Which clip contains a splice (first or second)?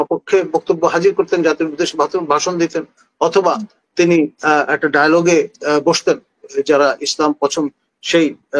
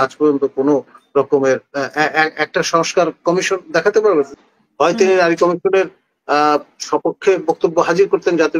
second